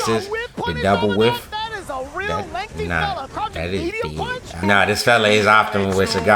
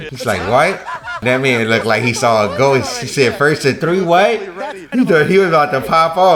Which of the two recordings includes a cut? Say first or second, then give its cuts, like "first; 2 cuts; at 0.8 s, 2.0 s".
first; 1 cut; at 4.6 s